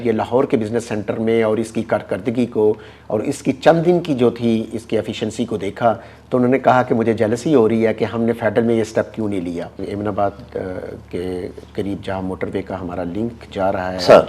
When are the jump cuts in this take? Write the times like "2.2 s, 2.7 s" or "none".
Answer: 9.8 s